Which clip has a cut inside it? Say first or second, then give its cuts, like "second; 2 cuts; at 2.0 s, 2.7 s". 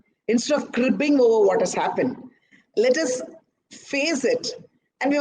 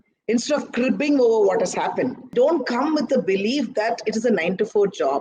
second; 1 cut; at 2.3 s